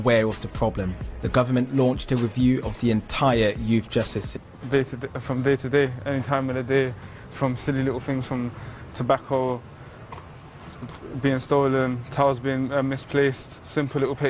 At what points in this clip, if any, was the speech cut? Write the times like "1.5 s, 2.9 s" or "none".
none